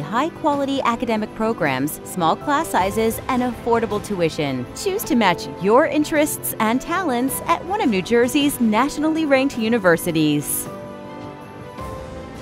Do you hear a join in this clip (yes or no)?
yes